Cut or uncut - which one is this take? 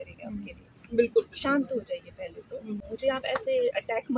cut